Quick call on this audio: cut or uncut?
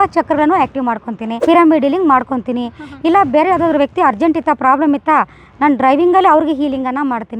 uncut